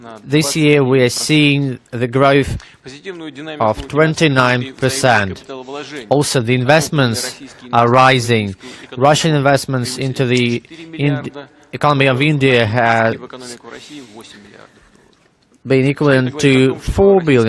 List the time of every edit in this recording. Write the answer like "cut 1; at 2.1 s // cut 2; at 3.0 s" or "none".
cut 1; at 4.4 s